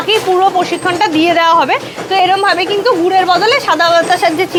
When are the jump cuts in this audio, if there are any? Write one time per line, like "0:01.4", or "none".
none